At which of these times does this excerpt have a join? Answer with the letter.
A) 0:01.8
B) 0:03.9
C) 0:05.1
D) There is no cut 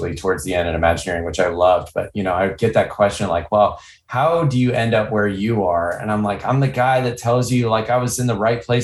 D